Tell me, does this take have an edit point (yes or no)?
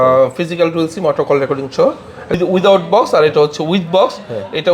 yes